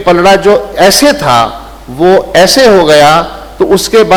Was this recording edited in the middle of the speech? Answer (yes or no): no